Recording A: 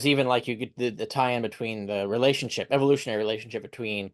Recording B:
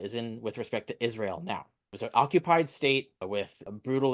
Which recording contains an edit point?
B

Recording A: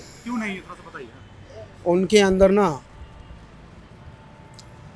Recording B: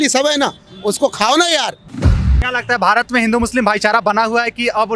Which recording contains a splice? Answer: B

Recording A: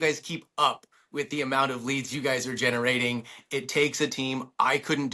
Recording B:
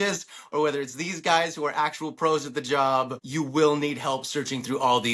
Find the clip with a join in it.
B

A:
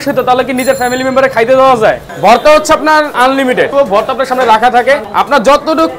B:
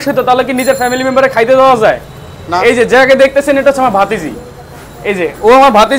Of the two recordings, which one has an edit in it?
A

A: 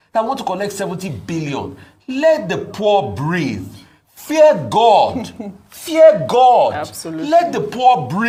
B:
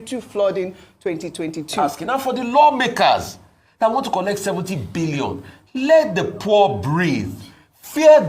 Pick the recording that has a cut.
B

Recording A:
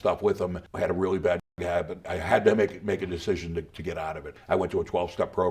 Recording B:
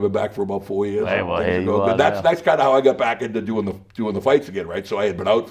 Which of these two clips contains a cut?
A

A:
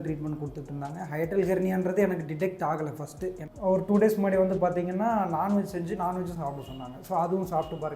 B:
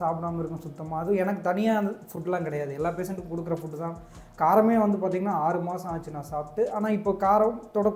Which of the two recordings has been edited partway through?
A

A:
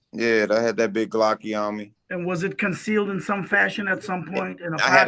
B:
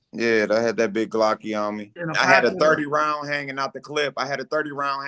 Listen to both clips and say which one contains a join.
B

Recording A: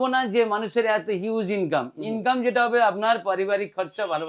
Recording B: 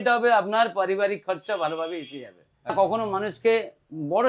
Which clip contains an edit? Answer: B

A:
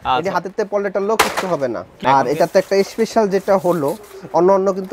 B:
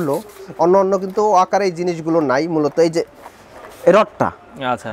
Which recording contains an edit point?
A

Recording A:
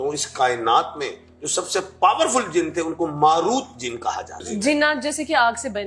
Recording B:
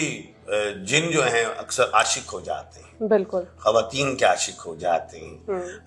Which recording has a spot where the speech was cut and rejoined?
A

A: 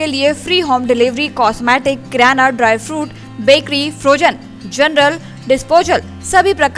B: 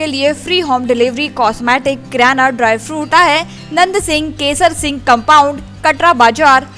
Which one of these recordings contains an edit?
B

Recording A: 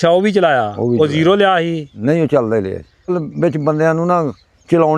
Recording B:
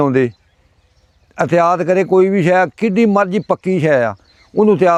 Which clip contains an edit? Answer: A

